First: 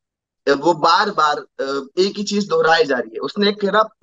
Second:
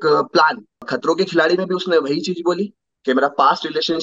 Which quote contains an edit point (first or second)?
second